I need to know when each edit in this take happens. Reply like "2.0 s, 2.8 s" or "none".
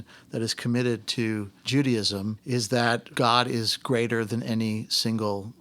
1.5 s, 2.4 s, 3.1 s

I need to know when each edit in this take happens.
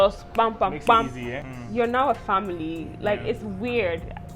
1.3 s

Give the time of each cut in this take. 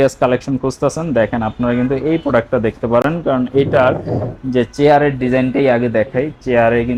none

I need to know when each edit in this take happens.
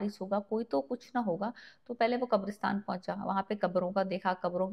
none

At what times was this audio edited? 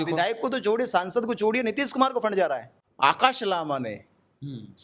2.8 s

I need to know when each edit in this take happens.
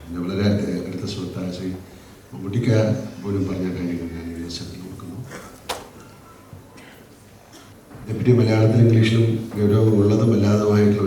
7.7 s

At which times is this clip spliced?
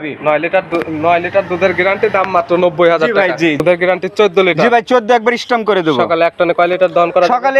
3.6 s

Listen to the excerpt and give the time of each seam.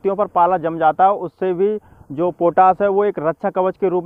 none

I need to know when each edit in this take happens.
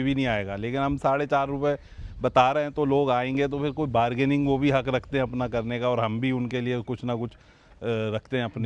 none

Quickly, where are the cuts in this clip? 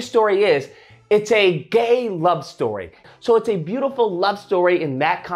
3.0 s

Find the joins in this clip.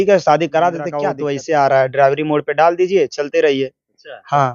1.1 s

